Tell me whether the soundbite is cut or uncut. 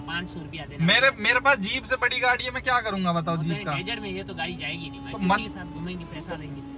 uncut